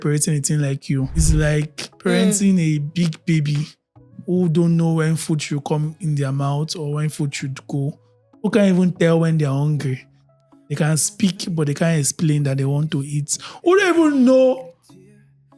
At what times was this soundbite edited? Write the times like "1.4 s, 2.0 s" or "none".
1.2 s

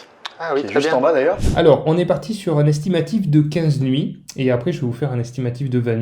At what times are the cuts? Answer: 1.4 s

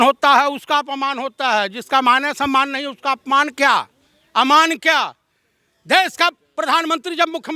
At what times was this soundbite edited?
none

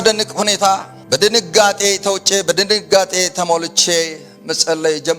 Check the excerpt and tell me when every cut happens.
0.9 s

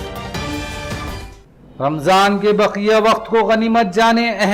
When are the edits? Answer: none

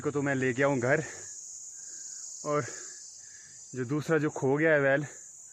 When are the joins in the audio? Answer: none

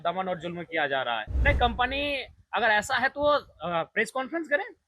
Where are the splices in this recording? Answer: 1.3 s

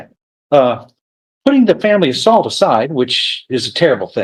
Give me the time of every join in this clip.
none

